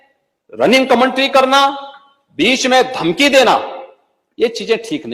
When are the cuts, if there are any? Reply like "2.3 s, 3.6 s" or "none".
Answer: none